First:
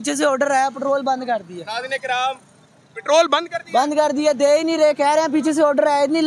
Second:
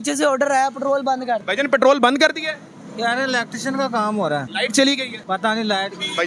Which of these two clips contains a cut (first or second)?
second